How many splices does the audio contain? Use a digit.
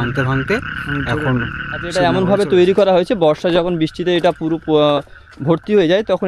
1